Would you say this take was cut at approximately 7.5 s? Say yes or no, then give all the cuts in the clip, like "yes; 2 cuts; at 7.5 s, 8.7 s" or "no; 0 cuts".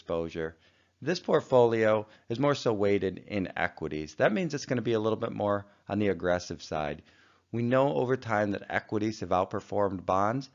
yes; 1 cut; at 7.5 s